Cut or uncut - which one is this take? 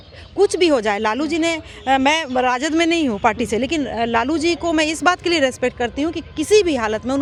uncut